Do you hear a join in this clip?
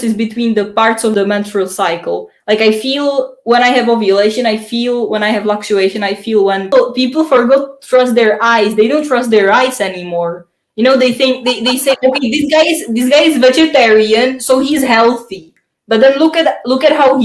yes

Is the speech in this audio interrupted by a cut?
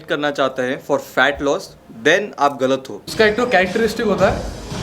yes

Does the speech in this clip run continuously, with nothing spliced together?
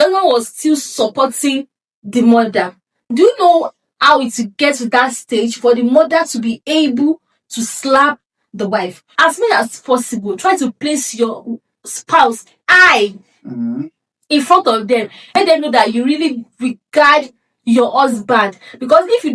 no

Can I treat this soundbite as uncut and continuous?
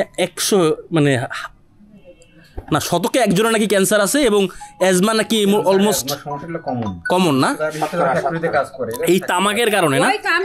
yes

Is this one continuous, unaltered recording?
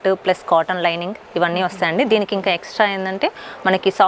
yes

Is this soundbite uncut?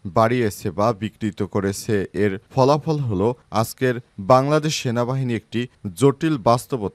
yes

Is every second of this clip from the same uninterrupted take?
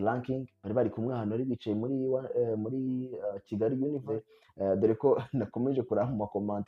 no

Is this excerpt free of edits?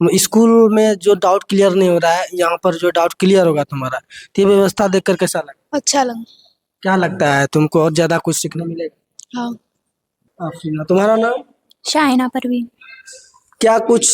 no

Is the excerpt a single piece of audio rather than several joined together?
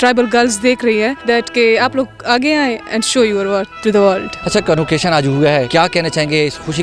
no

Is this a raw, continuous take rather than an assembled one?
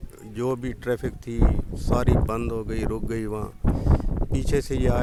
yes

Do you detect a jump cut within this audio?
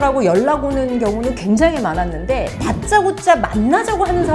no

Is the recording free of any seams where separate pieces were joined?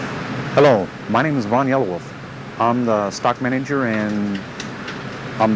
yes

